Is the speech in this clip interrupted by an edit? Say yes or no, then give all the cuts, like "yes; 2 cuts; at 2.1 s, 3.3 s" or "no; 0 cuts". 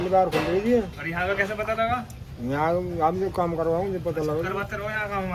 no; 0 cuts